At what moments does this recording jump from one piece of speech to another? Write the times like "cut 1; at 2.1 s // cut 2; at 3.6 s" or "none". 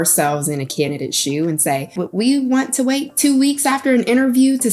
cut 1; at 2.0 s

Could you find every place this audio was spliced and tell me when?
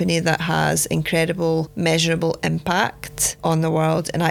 cut 1; at 1.7 s

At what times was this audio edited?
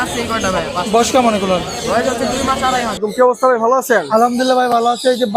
cut 1; at 3.0 s

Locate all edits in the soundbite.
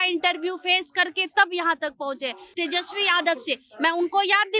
cut 1; at 2.4 s

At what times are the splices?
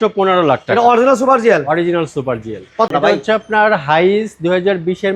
cut 1; at 2.9 s

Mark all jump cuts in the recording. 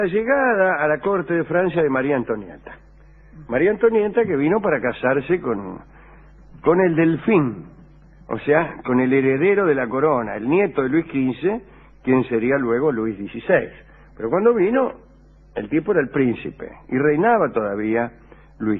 cut 1; at 15.0 s

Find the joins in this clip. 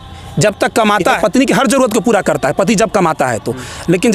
cut 1; at 1.2 s

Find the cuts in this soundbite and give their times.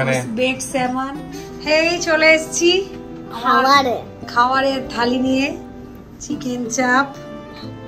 cut 1; at 1.3 s

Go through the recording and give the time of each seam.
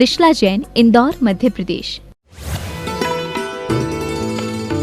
cut 1; at 2.0 s

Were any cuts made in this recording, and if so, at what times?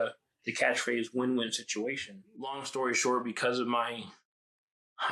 cut 1; at 2.6 s

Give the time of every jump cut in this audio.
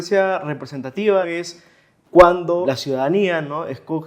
cut 1; at 1.3 s // cut 2; at 2.6 s

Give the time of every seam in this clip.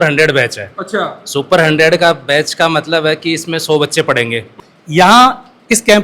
cut 1; at 4.5 s

